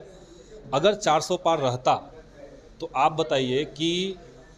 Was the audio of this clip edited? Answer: no; 0 cuts

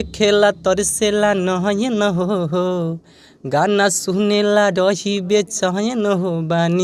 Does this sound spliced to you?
no; 0 cuts

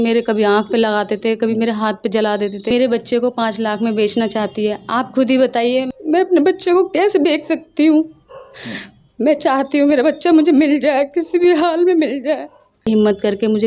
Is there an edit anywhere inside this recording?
yes; 3 cuts; at 2.7 s, 5.9 s, 12.9 s

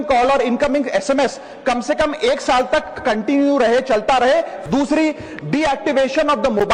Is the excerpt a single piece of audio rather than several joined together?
no; 1 cut; at 4.6 s

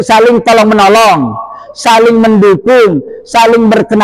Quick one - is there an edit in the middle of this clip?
no; 0 cuts

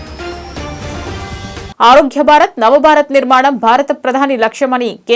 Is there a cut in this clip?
yes; 1 cut; at 1.7 s

